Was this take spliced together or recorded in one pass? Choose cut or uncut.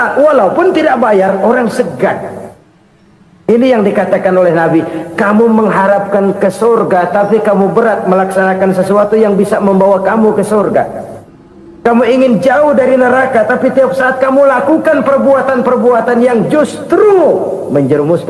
uncut